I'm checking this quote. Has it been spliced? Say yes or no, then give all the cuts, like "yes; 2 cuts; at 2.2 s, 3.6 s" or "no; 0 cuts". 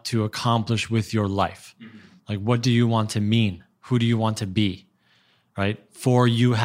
no; 0 cuts